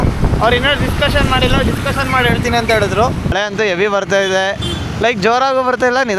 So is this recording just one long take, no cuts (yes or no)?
no